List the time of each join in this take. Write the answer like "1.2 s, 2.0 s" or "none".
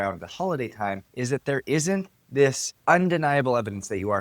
1.1 s